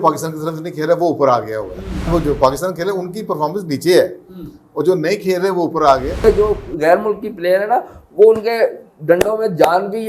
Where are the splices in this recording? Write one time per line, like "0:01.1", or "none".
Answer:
0:02.0
0:06.2